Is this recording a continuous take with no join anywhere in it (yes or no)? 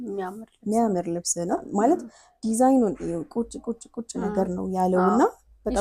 no